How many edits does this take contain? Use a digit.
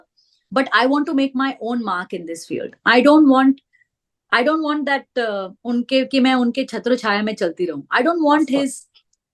0